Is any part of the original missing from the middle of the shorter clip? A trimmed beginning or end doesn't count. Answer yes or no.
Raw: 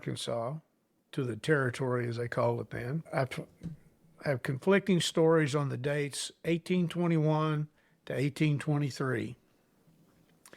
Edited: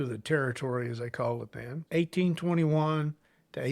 yes